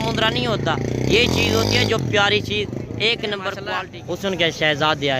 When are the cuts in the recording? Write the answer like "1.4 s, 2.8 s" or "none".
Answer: 3.7 s